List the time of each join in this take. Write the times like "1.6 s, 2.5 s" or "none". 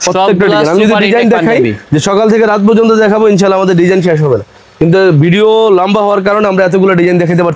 none